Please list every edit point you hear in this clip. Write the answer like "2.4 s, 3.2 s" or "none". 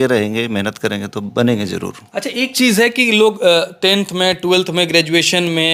none

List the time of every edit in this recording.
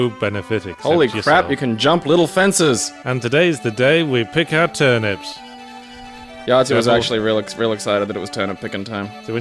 2.8 s

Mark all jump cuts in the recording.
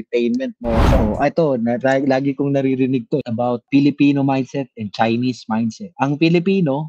1.0 s

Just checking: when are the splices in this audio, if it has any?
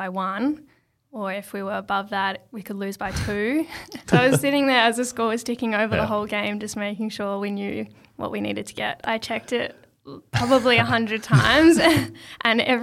3.9 s, 9.0 s

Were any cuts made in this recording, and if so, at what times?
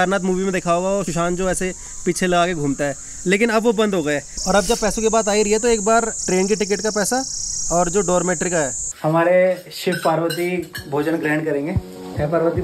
1.1 s, 4.2 s, 6.2 s, 8.9 s

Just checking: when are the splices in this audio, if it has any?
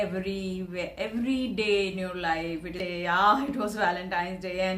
2.8 s

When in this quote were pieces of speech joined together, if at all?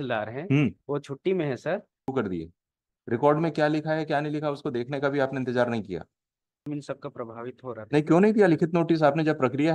2.1 s, 6.7 s

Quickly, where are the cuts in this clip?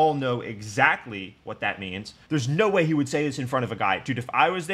2.1 s

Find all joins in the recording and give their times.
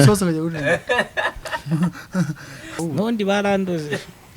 2.8 s

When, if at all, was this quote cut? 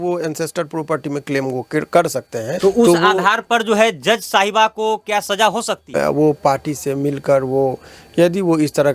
2.5 s, 5.8 s

